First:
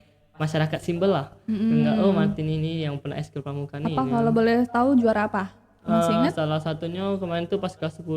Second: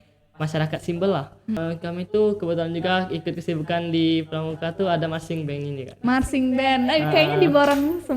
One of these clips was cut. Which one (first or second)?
second